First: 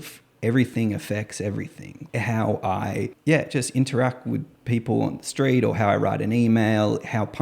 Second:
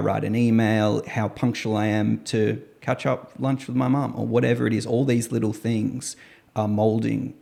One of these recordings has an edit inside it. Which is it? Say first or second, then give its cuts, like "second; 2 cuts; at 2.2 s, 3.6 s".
first; 2 cuts; at 1.9 s, 3.1 s